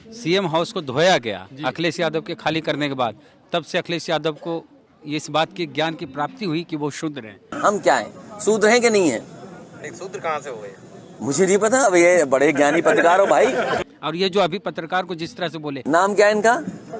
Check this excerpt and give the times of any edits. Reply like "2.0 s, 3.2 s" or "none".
7.6 s, 13.8 s, 15.8 s